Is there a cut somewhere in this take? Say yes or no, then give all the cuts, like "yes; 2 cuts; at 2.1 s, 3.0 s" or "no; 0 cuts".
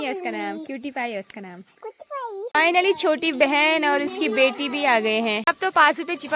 yes; 2 cuts; at 2.4 s, 5.4 s